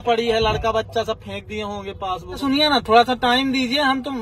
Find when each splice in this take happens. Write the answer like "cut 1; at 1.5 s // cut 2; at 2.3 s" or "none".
cut 1; at 2.4 s